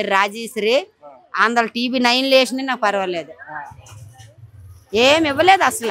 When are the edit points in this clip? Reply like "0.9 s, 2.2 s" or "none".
none